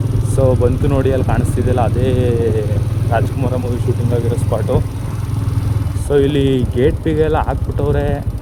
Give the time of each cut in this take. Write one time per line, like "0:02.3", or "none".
none